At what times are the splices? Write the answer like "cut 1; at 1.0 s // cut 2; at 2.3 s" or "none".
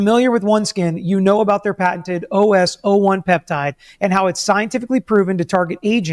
none